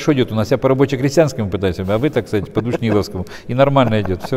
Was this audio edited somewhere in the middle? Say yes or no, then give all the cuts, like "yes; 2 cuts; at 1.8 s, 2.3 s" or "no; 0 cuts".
no; 0 cuts